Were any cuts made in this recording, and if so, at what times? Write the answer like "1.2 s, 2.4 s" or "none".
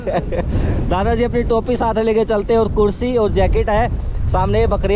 none